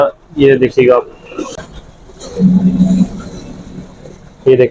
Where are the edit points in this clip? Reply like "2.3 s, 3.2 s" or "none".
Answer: 1.6 s